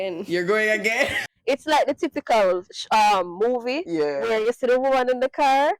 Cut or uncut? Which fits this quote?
cut